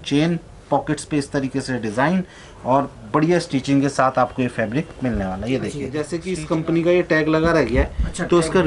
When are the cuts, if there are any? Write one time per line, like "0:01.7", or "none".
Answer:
0:06.0